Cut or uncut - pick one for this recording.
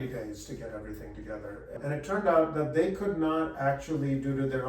cut